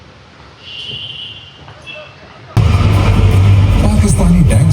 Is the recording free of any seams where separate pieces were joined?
no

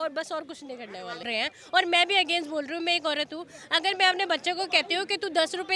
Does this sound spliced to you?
yes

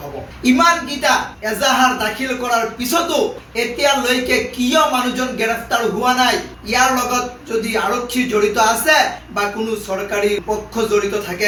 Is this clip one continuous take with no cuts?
yes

